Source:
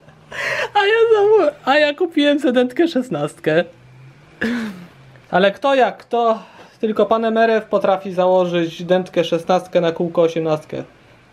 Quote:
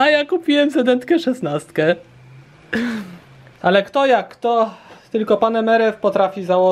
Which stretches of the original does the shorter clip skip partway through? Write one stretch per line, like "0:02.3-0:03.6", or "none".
none